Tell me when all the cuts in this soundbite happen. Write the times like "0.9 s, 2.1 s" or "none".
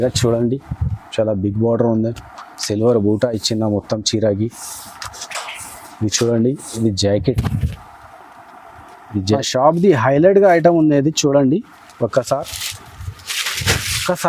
9.4 s